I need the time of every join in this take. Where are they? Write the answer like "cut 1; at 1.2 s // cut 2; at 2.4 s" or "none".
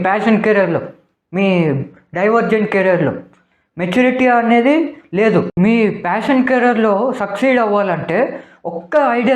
cut 1; at 5.6 s